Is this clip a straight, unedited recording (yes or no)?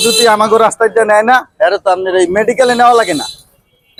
yes